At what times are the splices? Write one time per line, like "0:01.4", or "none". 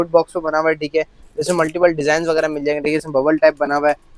none